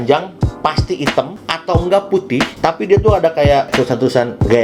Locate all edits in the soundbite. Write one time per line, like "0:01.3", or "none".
none

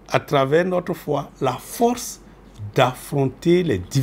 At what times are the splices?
none

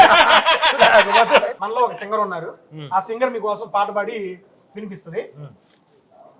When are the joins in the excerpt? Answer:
0:01.6

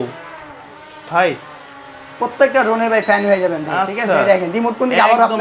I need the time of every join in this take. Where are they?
none

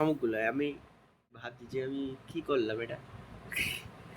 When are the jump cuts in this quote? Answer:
0:01.5

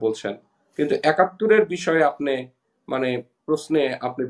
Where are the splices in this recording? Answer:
none

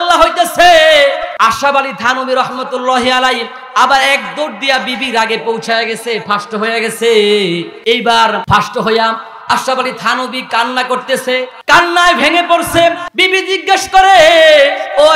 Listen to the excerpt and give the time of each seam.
0:01.3
0:07.7
0:08.4
0:11.6
0:13.1

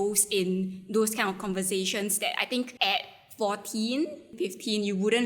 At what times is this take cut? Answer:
0:02.7
0:04.3

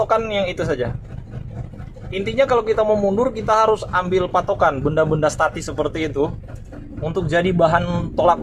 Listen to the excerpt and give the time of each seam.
none

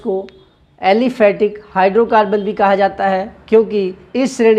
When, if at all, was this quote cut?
none

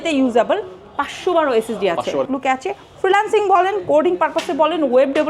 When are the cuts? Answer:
0:02.3

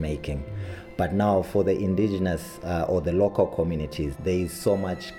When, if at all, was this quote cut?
0:04.1

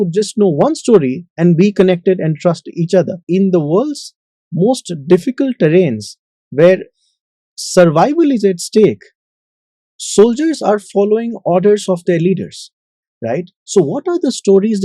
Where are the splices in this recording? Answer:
0:03.2

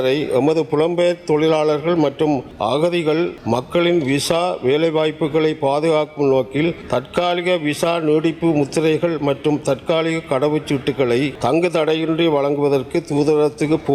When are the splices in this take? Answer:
0:02.5
0:03.4
0:06.8
0:11.3

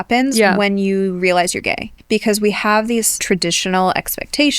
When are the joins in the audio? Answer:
0:01.9
0:03.2

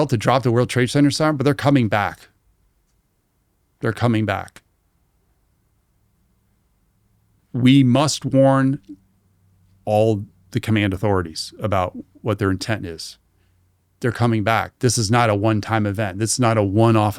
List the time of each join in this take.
none

